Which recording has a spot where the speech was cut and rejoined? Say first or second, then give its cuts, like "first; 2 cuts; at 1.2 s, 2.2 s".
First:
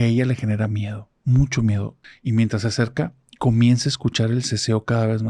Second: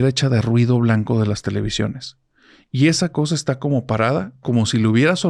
first; 1 cut; at 2.0 s